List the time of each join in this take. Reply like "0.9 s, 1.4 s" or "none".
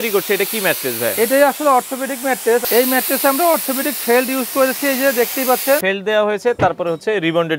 2.6 s, 5.8 s